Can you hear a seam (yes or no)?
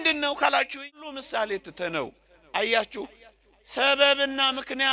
yes